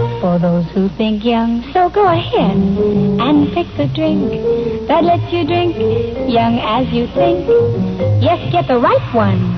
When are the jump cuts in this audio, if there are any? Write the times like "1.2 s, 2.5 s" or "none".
5.1 s